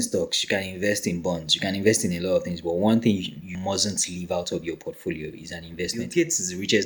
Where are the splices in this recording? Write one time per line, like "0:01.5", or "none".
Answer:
0:03.6
0:06.0